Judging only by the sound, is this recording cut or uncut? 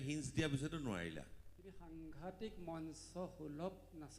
cut